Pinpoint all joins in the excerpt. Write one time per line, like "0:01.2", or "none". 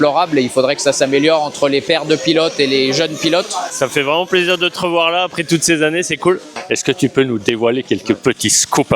0:03.6
0:06.6